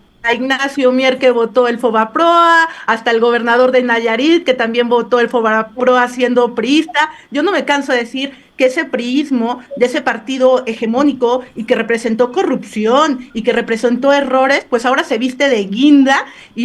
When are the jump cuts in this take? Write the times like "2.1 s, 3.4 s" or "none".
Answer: none